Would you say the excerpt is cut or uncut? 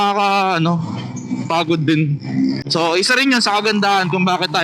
uncut